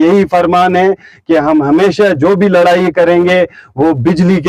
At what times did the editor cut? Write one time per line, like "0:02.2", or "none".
none